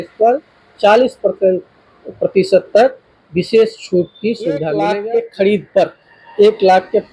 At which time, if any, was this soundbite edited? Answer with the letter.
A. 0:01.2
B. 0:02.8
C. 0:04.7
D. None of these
C